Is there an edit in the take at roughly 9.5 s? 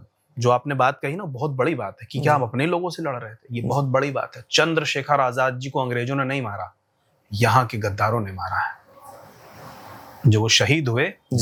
no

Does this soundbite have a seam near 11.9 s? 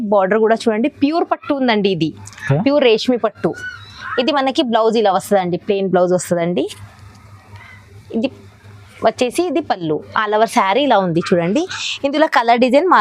no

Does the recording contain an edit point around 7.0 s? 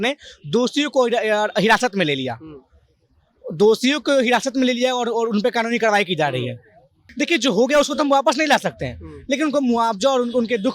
yes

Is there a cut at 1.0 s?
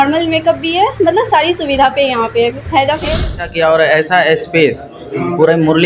no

